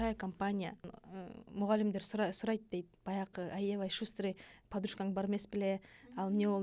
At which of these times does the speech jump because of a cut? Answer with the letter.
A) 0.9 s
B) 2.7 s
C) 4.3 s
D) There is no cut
A